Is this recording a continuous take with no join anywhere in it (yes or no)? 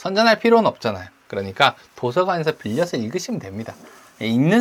yes